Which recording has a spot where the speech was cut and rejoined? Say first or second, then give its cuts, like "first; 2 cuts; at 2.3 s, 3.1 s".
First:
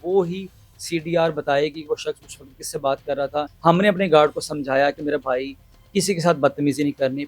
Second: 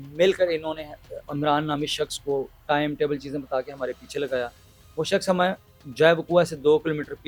first; 1 cut; at 3.5 s